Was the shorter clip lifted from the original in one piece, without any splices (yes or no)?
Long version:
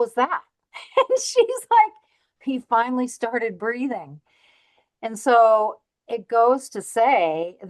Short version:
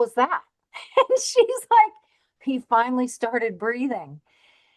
yes